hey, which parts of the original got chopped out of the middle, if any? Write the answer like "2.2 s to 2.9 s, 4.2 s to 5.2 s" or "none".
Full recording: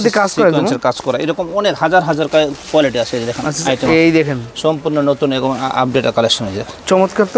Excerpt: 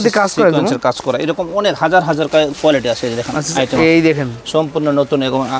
2.5 s to 2.6 s